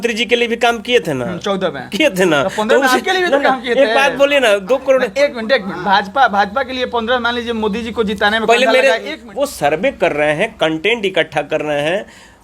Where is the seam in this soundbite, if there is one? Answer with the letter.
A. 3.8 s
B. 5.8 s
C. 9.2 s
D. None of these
C